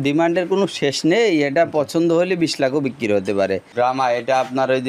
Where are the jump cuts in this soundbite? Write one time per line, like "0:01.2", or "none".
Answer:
0:03.7